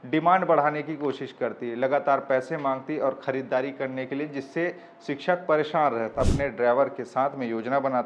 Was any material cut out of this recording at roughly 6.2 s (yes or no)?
yes